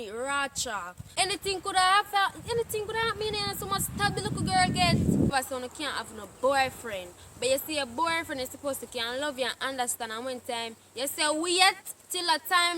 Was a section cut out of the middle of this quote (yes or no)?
yes